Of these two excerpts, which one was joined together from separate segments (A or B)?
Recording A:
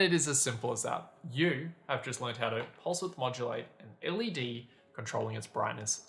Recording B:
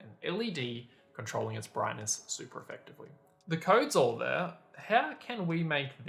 B